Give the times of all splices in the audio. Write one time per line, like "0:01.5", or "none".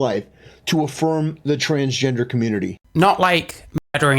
0:02.8